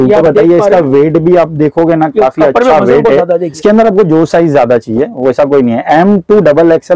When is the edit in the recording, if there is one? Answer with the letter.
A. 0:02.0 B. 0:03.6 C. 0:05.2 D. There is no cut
B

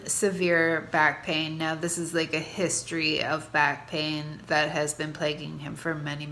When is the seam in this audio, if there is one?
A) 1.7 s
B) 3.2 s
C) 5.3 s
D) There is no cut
D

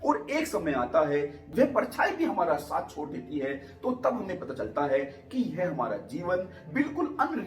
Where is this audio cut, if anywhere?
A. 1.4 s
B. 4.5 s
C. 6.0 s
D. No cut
A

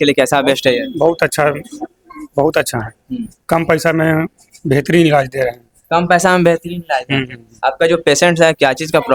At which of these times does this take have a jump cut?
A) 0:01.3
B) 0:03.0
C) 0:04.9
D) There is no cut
D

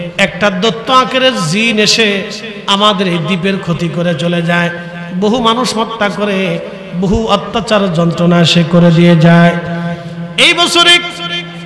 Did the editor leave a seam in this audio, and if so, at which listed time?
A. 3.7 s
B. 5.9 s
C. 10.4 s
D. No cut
D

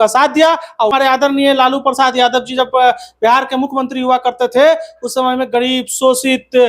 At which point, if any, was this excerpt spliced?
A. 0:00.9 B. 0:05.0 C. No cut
A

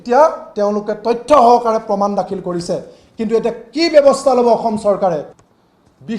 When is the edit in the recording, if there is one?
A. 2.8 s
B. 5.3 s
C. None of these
B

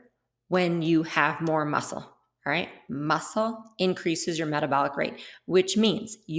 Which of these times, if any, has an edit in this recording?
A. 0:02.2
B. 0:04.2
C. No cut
C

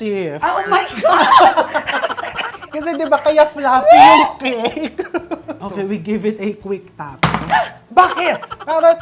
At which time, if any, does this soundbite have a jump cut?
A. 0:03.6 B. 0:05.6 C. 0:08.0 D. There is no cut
B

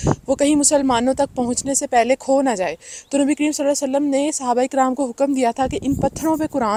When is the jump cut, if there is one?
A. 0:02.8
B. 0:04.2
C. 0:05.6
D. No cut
D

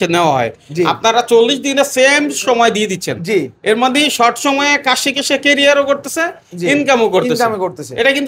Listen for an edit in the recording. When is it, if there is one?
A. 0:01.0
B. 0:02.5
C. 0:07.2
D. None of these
D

